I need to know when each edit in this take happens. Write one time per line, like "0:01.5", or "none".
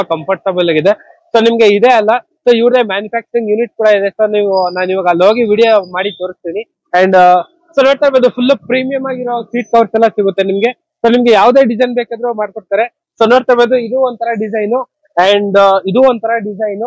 none